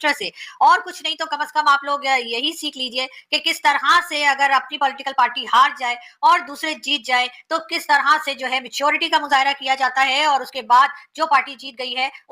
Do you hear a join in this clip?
no; 0 cuts

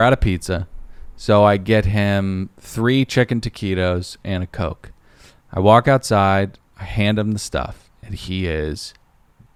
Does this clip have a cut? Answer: no; 0 cuts

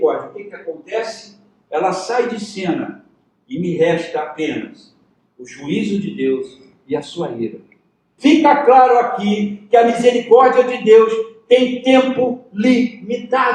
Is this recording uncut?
no; 1 cut; at 8.1 s

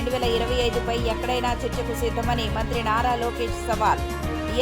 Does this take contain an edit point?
no; 0 cuts

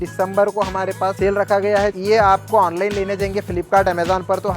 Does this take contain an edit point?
yes; 2 cuts; at 1.1 s, 1.9 s

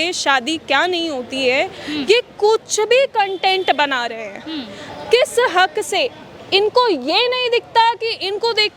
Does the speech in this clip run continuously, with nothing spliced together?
yes; 0 cuts

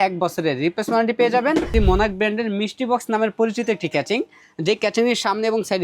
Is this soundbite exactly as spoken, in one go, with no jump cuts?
no; 1 cut; at 1.7 s

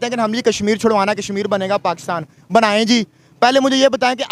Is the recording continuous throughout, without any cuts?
yes; 0 cuts

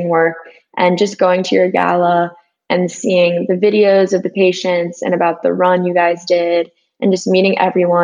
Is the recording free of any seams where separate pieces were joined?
yes; 0 cuts

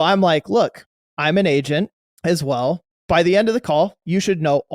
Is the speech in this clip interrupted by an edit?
yes; 2 cuts; at 2.0 s, 2.9 s

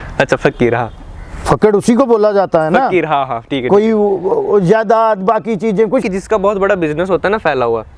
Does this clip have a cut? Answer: yes; 1 cut; at 6.0 s

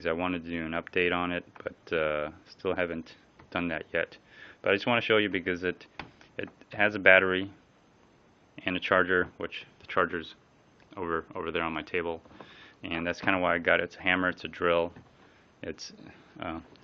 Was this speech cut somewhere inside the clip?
yes; 1 cut; at 12.8 s

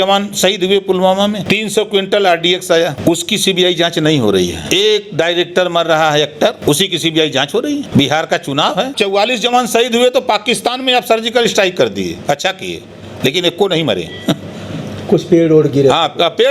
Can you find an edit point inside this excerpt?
yes; 6 cuts; at 1.4 s, 3.0 s, 4.6 s, 6.6 s, 7.9 s, 8.9 s

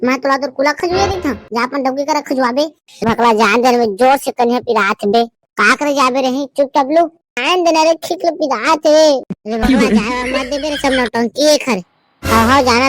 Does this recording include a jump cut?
yes; 2 cuts; at 3.0 s, 7.4 s

